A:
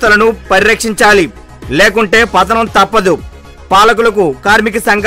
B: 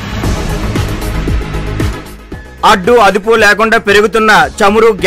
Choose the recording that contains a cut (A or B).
B